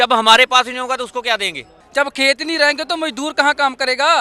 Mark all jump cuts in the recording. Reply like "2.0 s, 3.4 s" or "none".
1.7 s